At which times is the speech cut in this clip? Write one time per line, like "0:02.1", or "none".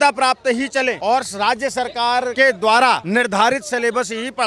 0:01.0
0:02.3
0:03.0